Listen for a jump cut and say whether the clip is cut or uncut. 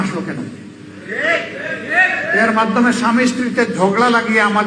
uncut